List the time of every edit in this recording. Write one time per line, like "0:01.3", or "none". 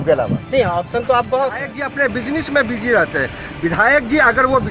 0:01.8